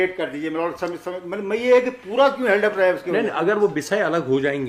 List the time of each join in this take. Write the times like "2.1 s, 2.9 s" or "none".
none